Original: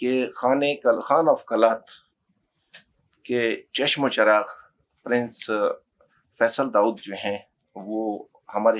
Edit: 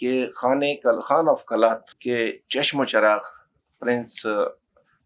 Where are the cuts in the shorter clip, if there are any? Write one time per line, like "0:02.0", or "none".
0:01.9